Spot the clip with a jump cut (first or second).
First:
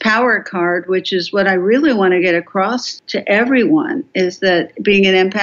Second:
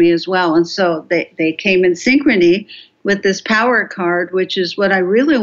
first